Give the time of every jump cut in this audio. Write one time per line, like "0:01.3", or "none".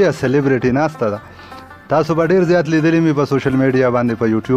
none